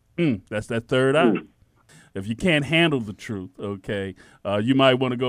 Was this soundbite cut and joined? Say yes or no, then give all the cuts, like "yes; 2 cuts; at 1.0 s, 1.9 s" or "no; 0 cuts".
yes; 1 cut; at 1.8 s